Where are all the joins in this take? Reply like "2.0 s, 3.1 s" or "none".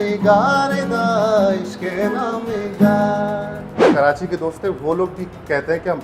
3.9 s